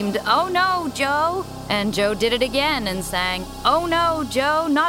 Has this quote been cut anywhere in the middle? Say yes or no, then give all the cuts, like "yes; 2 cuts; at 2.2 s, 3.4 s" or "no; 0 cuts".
yes; 2 cuts; at 1.5 s, 3.4 s